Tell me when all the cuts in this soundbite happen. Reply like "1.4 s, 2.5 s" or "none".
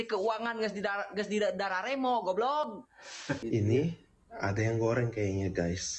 3.4 s